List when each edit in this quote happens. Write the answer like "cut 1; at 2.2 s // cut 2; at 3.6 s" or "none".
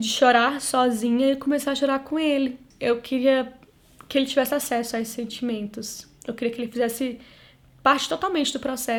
none

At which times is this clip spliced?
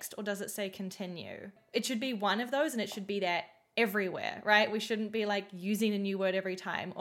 cut 1; at 1.6 s

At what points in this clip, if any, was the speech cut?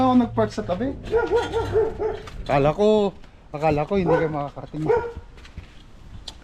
none

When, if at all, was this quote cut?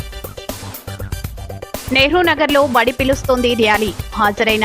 cut 1; at 1.8 s

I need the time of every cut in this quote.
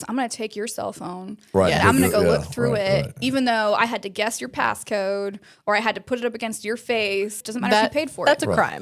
cut 1; at 7.4 s

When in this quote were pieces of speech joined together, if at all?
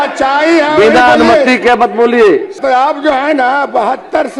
cut 1; at 2.6 s

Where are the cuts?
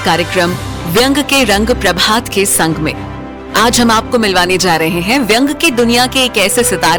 none

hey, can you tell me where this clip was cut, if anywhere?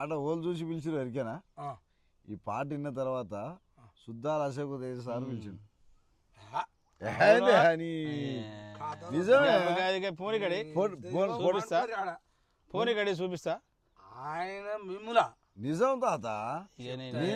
none

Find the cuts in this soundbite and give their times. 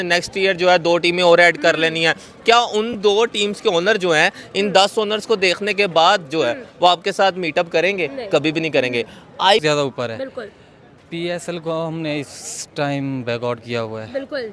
cut 1; at 9.6 s

